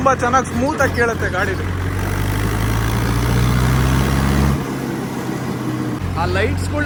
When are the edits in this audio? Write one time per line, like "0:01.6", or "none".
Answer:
none